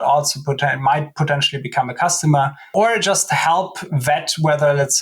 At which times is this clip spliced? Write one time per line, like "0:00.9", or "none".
0:02.7